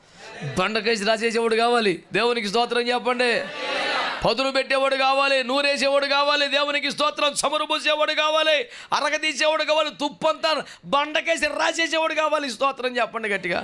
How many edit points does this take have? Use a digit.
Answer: 0